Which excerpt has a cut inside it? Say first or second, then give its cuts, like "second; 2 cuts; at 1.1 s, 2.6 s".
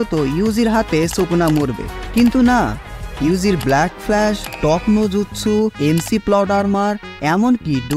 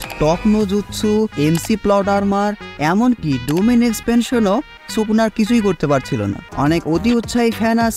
second; 1 cut; at 6.5 s